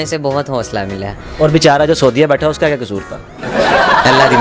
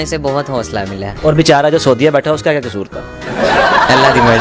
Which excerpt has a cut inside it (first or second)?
second